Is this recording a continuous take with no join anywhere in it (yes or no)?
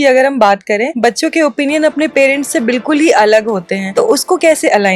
no